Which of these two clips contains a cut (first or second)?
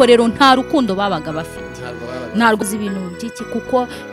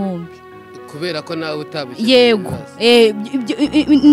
first